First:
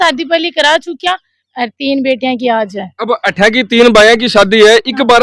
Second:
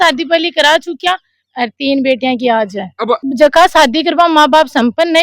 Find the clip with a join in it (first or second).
second